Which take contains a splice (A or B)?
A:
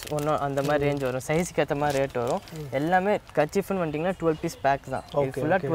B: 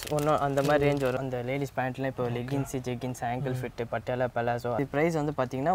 B